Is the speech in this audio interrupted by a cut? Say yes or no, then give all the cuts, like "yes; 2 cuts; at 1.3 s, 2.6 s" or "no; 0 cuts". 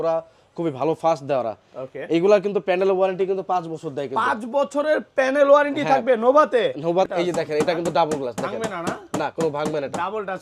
yes; 1 cut; at 7.1 s